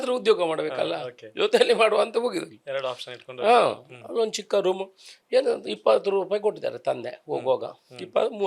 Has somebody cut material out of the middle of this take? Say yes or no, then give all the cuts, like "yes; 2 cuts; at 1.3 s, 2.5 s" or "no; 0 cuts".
no; 0 cuts